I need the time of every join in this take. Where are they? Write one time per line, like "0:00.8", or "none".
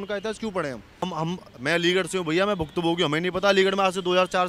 0:01.1